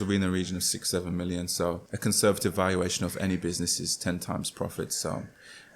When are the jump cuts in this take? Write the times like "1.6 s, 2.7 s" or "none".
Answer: 1.9 s